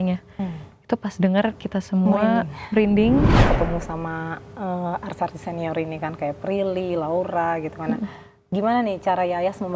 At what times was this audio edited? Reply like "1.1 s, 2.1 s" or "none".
3.4 s